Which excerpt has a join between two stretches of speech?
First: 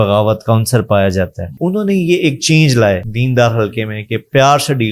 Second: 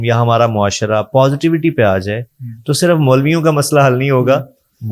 first; 2 cuts; at 1.6 s, 3.1 s

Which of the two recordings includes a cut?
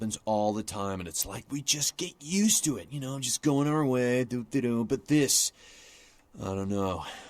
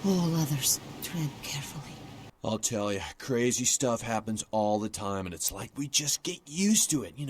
second; 1 cut; at 2.2 s

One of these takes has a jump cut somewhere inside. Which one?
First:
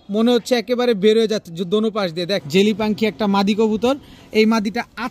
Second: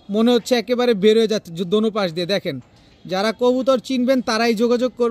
first; 1 cut; at 2.4 s

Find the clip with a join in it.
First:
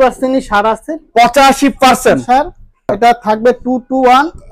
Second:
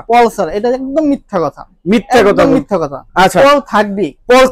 first; 1 cut; at 2.9 s

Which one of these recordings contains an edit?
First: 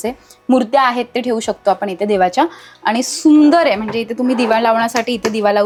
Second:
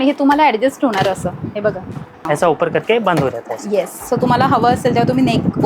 second; 1 cut; at 2.2 s

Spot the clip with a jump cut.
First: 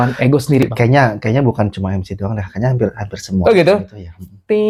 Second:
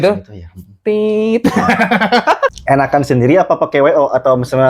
second; 1 cut; at 2.5 s

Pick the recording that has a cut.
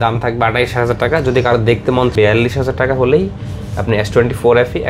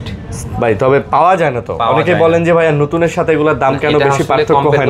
first; 1 cut; at 2.1 s

